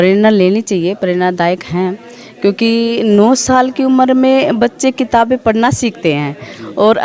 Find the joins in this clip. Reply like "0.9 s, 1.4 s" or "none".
none

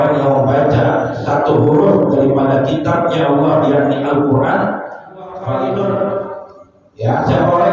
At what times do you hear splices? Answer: 5.4 s

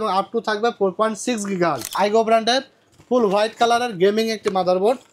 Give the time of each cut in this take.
1.9 s

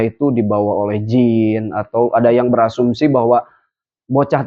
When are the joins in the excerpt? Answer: none

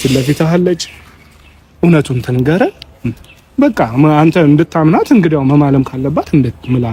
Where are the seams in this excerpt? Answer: none

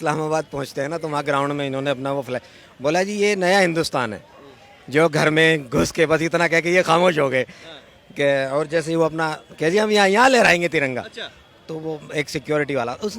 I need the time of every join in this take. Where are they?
none

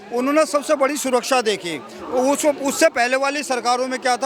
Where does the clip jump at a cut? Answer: none

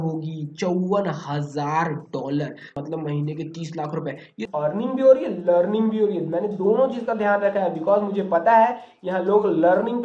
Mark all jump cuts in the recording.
2.8 s, 4.4 s

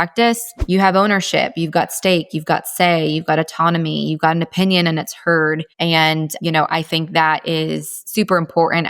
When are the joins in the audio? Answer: 5.7 s

